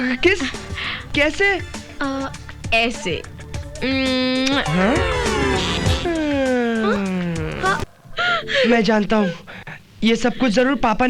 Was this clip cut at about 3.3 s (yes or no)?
no